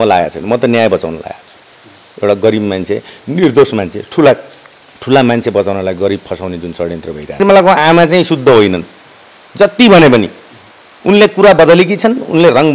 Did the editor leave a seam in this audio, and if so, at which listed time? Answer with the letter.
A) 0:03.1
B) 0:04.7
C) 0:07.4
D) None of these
C